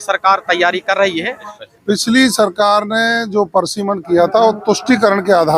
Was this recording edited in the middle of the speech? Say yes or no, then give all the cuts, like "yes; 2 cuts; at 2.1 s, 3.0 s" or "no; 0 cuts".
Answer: yes; 1 cut; at 1.5 s